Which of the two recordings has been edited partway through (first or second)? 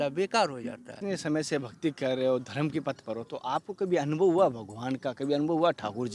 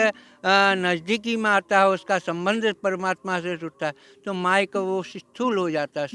first